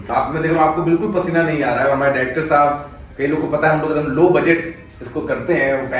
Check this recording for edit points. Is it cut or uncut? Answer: uncut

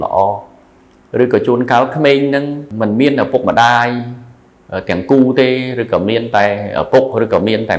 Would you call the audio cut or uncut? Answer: cut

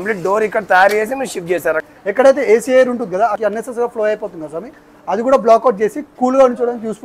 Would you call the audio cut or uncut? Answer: cut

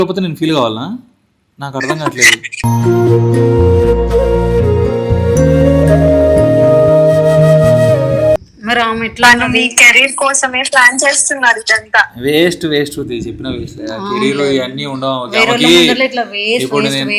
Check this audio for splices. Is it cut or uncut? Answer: cut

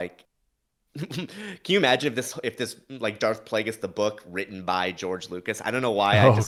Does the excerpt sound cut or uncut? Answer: uncut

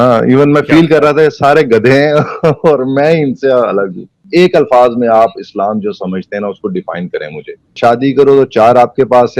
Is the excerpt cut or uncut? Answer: cut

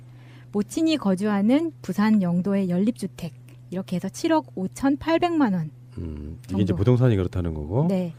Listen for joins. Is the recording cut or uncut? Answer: uncut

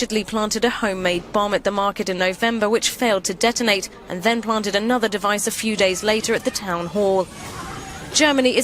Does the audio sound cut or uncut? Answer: cut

